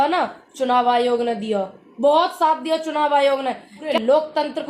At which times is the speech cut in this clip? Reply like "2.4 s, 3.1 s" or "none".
3.8 s